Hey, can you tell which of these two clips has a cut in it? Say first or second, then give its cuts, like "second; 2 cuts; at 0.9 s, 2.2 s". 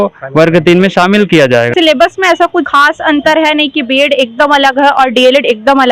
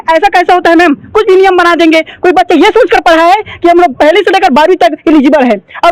first; 2 cuts; at 1.7 s, 2.7 s